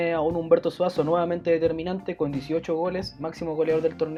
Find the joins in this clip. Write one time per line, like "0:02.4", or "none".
none